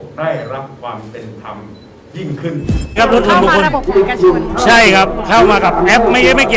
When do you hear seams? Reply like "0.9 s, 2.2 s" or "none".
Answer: 3.0 s